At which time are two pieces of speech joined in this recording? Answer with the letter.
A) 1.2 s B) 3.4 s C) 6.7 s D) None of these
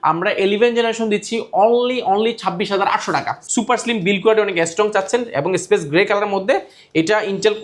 B